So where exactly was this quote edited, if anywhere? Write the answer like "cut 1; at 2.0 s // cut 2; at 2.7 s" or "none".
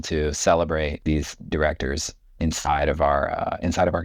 cut 1; at 1.5 s